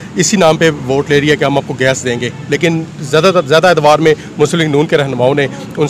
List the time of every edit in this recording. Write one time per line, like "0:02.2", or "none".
none